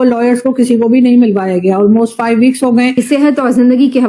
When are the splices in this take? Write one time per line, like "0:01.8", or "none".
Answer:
0:03.0